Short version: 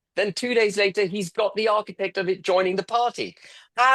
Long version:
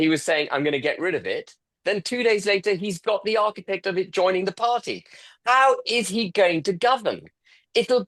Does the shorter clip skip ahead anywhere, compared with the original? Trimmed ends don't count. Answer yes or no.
no